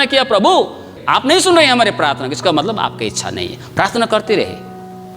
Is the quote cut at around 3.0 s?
no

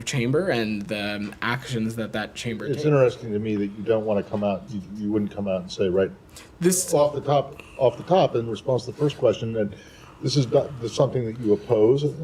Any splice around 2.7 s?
yes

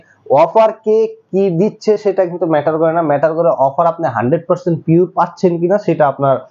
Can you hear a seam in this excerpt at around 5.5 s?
no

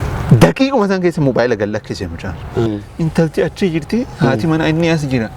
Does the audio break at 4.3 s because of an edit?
no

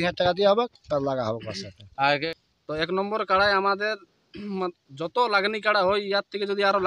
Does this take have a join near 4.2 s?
no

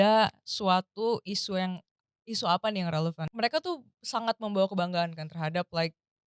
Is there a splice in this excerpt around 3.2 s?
yes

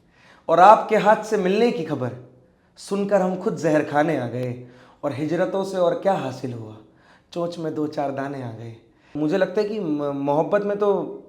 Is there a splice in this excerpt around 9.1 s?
yes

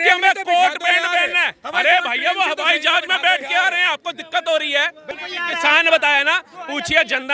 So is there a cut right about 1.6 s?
no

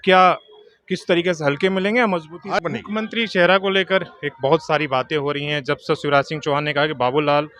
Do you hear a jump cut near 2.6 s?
yes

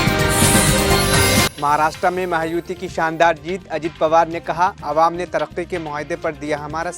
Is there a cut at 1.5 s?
yes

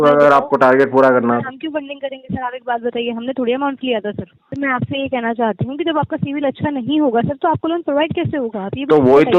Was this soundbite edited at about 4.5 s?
yes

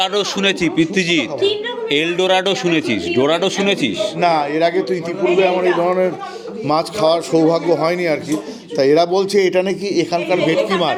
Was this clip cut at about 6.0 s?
no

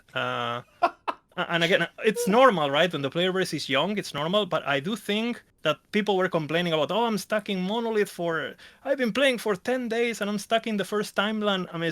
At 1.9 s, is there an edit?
no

